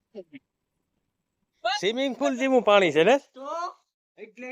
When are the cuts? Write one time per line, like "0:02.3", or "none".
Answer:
0:02.0